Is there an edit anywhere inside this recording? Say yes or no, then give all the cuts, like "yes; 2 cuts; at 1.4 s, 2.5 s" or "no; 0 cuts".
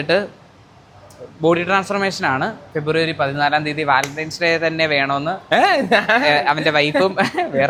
no; 0 cuts